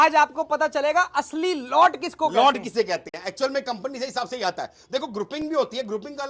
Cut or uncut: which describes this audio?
uncut